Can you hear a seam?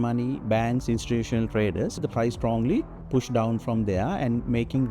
yes; 2 cuts; at 2.0 s, 3.0 s

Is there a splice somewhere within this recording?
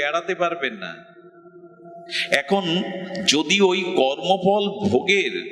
no; 0 cuts

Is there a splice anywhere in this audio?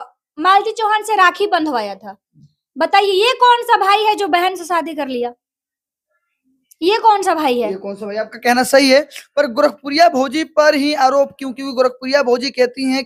no; 0 cuts

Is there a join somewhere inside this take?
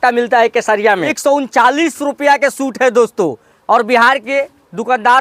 yes; 1 cut; at 1.1 s

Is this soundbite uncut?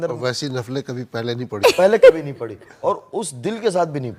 yes; 0 cuts

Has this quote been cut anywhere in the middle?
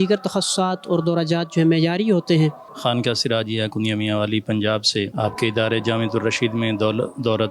yes; 2 cuts; at 2.7 s, 5.1 s

